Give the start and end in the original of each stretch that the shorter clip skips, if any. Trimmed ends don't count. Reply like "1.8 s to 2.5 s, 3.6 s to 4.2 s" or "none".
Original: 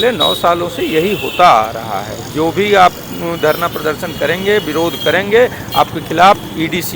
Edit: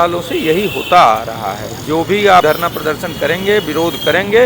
2.9 s to 3.4 s